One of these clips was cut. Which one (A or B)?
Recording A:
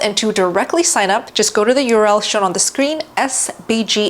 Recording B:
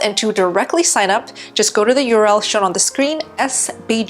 A